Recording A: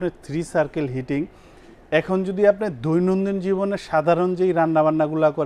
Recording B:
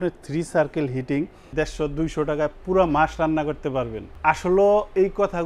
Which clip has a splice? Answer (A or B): B